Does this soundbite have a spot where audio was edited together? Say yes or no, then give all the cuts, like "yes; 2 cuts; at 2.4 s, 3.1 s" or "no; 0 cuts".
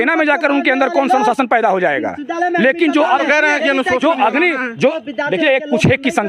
no; 0 cuts